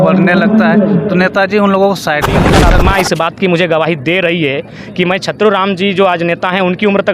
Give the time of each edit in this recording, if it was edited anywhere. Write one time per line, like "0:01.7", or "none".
0:02.5